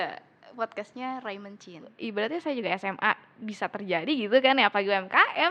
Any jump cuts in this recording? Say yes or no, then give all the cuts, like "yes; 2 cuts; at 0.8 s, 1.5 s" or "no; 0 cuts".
yes; 1 cut; at 1.9 s